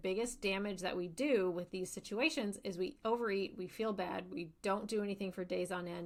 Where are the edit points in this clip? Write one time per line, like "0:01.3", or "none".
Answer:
none